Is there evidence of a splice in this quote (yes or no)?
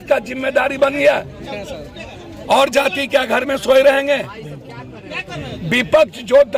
no